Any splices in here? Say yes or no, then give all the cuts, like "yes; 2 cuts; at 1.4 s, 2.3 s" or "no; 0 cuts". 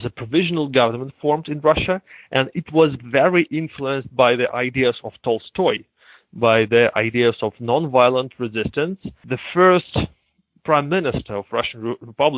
no; 0 cuts